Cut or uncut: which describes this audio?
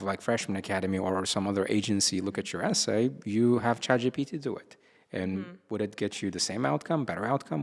uncut